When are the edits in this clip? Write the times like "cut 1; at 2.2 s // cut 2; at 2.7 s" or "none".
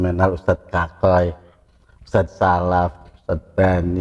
none